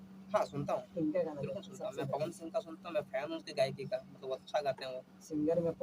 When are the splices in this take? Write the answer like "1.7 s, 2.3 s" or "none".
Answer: none